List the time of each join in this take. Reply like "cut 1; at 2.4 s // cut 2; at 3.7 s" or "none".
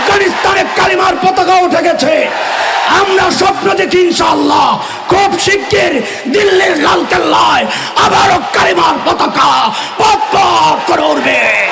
none